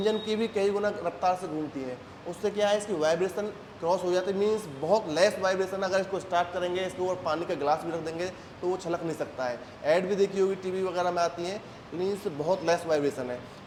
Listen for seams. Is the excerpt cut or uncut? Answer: uncut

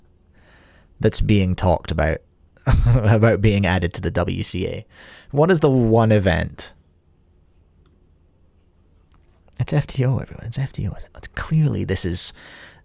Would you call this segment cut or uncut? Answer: uncut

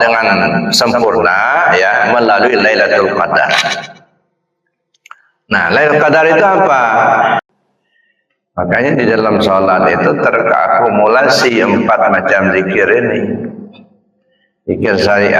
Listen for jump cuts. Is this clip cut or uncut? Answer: cut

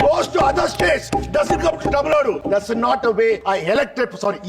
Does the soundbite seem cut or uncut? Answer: cut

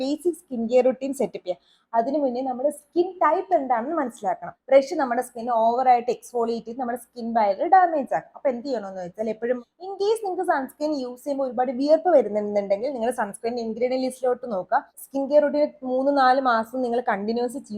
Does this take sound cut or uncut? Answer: cut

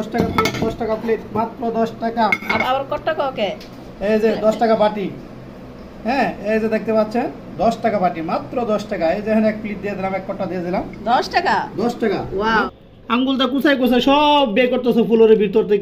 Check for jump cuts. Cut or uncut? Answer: cut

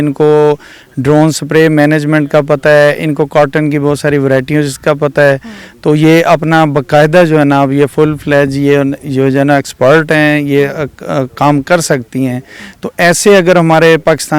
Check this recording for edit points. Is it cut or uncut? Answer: uncut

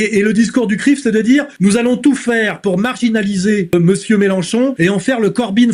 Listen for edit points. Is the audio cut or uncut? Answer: cut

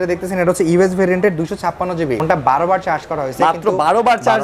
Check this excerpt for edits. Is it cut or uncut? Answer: cut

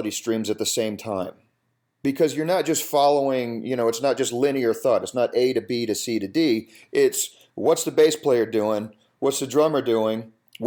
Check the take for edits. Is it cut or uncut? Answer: uncut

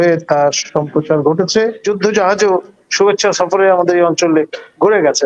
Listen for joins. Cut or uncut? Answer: cut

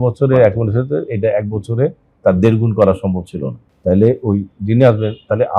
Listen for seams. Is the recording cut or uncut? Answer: uncut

